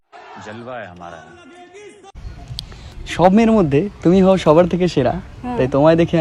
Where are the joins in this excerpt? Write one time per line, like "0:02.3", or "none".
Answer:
none